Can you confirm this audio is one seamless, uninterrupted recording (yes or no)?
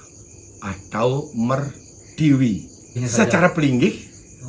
no